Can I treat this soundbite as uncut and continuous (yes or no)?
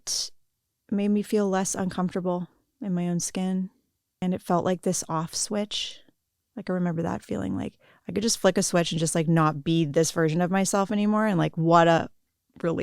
no